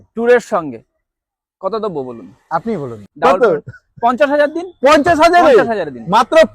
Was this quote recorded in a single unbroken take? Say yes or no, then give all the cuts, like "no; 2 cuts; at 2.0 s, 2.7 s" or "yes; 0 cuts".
no; 1 cut; at 3.0 s